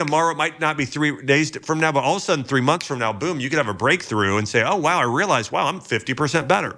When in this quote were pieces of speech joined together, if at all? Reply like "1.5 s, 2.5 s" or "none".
none